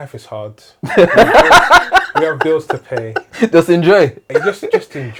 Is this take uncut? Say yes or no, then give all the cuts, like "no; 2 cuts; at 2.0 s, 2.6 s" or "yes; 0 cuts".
yes; 0 cuts